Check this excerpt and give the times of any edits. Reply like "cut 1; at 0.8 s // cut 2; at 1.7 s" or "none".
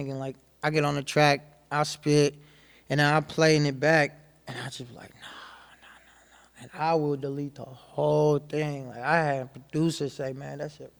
none